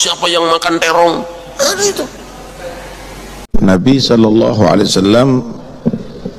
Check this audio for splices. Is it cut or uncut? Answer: cut